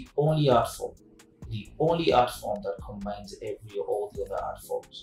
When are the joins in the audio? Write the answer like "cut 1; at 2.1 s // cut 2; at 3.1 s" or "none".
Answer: none